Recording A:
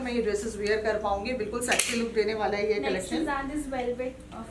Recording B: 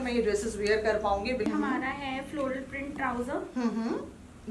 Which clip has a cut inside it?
B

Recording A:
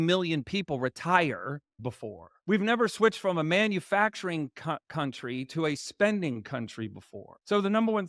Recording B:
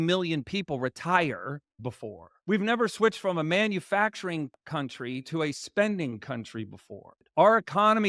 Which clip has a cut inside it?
B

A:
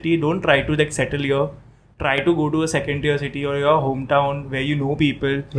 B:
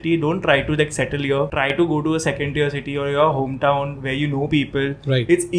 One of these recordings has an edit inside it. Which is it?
B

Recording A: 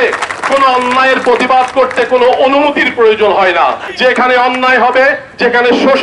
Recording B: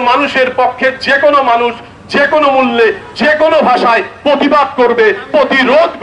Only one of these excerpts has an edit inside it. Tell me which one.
A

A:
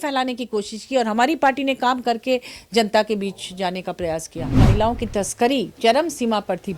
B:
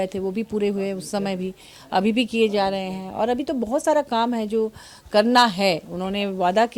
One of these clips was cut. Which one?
A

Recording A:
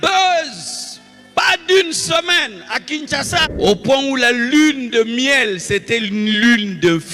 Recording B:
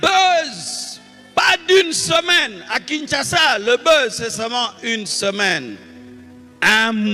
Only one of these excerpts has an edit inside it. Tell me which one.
A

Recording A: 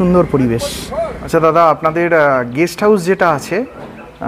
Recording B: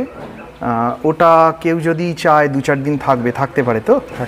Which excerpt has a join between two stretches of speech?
A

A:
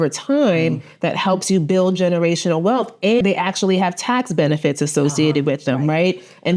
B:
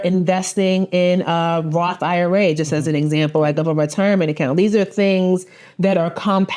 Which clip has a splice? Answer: A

